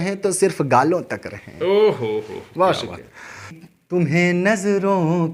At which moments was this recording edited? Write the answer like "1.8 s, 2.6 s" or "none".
none